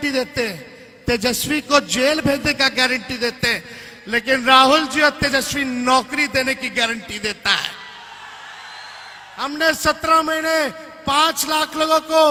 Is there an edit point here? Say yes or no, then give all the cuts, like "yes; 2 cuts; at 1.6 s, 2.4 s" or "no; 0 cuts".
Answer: no; 0 cuts